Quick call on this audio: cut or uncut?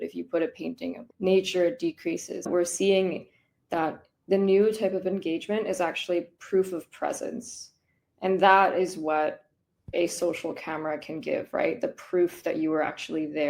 cut